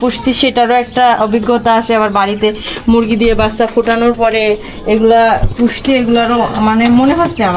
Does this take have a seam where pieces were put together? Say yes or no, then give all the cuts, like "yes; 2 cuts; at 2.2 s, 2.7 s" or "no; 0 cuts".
no; 0 cuts